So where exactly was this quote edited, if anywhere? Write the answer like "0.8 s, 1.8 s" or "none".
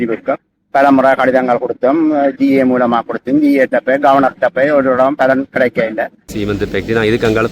6.3 s